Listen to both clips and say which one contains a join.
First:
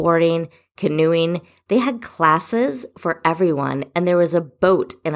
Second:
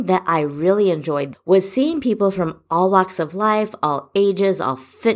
second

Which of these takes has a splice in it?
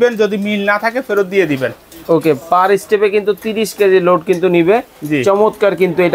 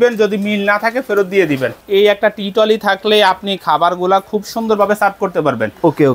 second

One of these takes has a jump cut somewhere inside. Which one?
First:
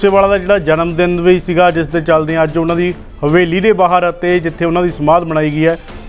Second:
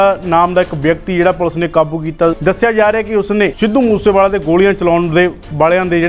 second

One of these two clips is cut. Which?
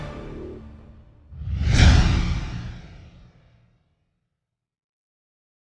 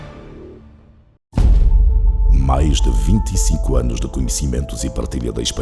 second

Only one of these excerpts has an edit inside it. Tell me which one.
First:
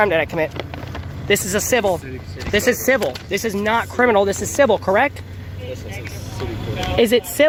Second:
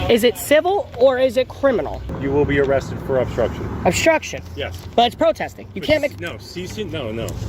second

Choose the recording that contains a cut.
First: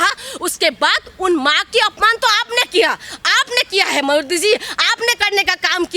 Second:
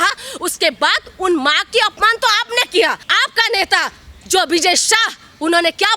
second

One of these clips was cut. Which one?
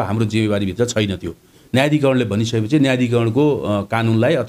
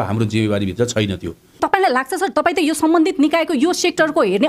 second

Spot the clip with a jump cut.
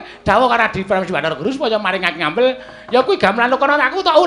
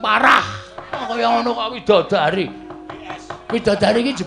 second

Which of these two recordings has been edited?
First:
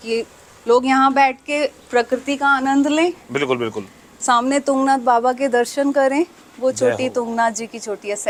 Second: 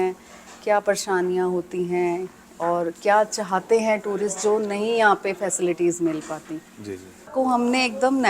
second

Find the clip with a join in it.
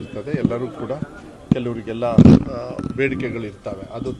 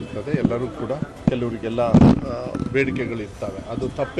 second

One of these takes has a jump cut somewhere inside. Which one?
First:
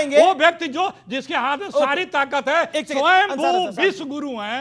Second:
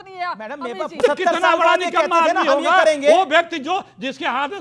second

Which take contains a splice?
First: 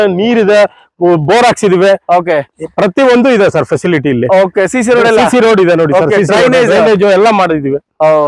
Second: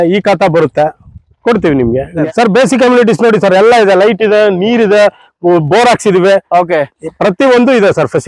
second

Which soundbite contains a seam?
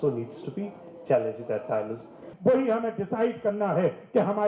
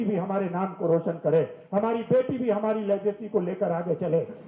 first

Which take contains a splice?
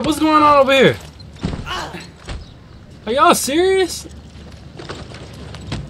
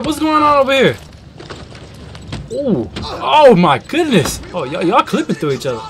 second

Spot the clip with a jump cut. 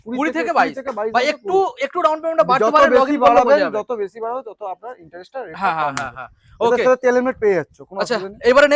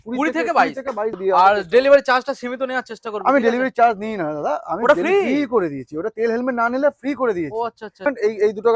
second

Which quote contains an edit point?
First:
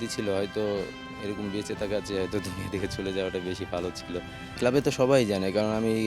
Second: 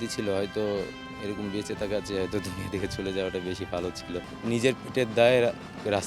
second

